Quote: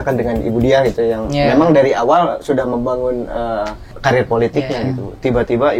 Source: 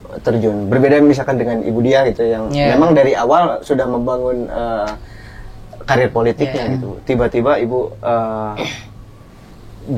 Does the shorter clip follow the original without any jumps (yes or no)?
no